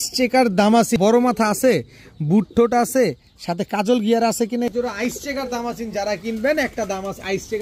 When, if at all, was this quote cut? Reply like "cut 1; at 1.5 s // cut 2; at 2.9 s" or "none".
cut 1; at 1.0 s // cut 2; at 4.7 s